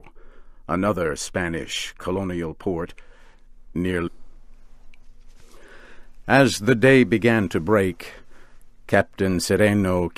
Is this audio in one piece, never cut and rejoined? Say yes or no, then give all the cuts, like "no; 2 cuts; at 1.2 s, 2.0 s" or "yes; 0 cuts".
yes; 0 cuts